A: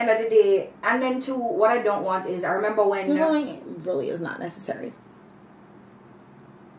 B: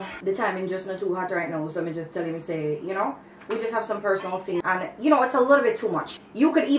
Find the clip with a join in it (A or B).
A